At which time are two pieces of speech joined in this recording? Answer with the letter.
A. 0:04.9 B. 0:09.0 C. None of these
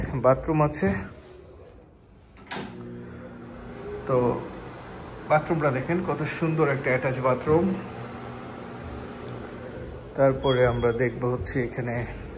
C